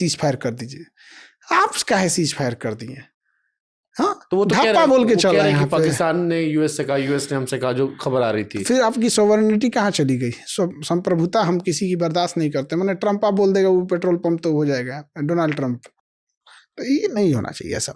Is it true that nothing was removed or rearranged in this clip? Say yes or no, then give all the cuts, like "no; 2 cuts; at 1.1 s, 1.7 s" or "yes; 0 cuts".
yes; 0 cuts